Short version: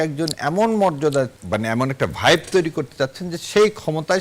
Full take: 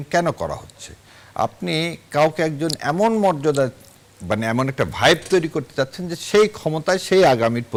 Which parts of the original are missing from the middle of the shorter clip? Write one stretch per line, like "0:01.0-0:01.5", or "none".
0:03.8-0:04.2